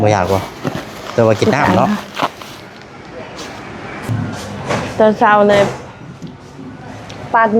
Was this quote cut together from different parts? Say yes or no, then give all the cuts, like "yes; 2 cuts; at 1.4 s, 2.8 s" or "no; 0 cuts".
yes; 1 cut; at 4.1 s